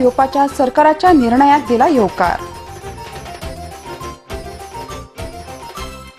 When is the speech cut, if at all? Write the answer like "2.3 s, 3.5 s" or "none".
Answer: none